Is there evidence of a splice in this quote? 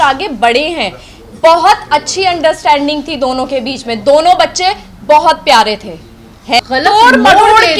yes; 1 cut; at 6.6 s

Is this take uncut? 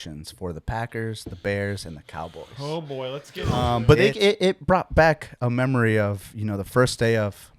no; 1 cut; at 3.7 s

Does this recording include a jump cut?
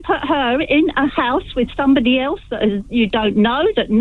no; 0 cuts

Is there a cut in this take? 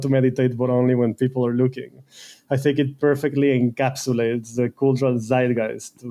no; 0 cuts

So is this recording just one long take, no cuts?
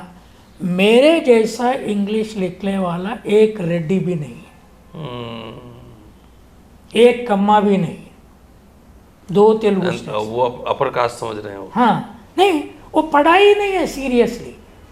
yes; 0 cuts

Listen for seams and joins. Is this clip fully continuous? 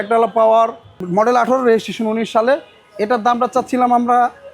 yes; 0 cuts

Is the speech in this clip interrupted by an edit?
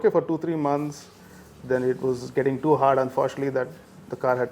no; 0 cuts

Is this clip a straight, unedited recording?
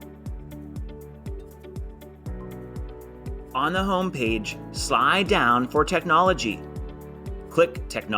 no; 2 cuts; at 1.2 s, 3.4 s

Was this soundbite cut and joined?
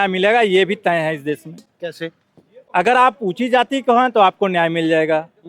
no; 0 cuts

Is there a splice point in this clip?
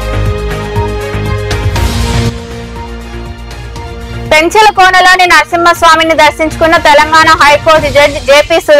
yes; 1 cut; at 1.6 s

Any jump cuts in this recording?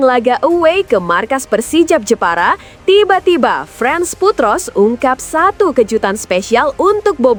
no; 0 cuts

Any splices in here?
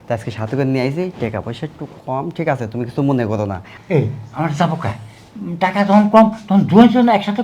yes; 1 cut; at 3.7 s

